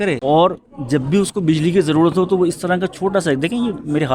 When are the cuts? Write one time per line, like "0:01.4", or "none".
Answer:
none